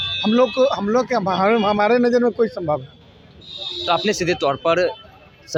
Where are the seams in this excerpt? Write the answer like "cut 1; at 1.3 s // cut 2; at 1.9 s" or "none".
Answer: none